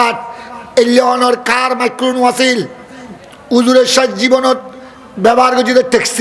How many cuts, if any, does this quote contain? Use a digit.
0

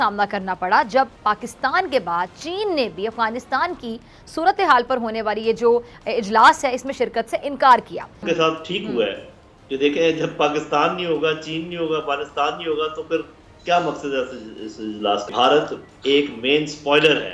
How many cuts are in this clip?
2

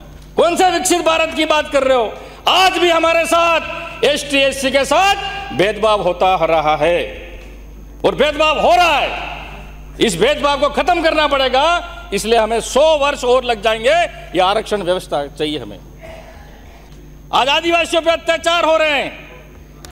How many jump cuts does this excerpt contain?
1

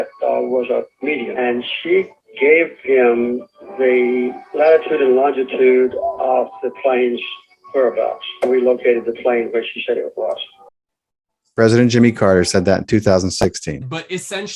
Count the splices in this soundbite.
3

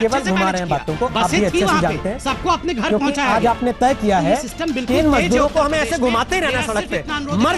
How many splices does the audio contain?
0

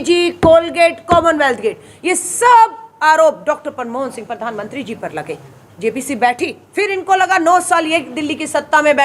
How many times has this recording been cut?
1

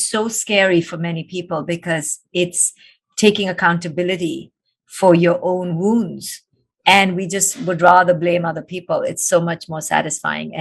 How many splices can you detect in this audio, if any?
0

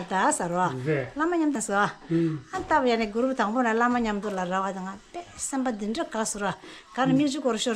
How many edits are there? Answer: 1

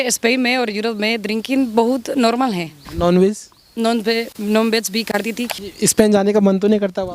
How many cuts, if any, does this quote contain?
2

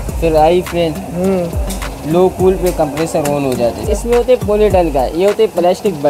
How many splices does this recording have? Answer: 1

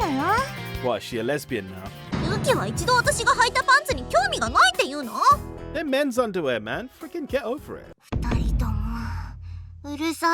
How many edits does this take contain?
2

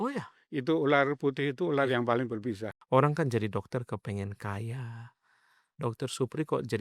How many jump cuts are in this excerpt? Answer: 1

